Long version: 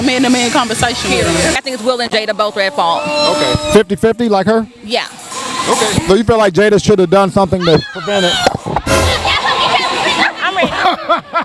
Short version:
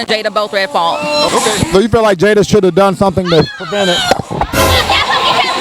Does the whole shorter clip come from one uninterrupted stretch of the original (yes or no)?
no